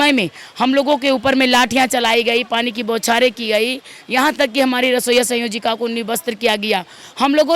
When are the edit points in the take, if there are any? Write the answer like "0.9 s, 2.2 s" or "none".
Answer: none